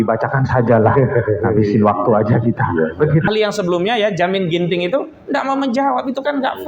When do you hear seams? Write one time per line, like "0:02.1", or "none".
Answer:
0:03.3